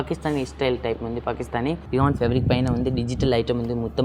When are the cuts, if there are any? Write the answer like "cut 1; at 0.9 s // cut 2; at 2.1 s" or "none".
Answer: cut 1; at 1.8 s